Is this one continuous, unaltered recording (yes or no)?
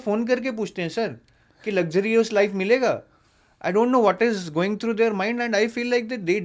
yes